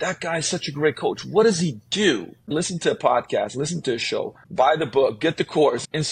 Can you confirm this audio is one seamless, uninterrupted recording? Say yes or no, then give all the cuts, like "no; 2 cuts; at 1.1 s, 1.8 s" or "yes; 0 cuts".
no; 2 cuts; at 2.4 s, 4.4 s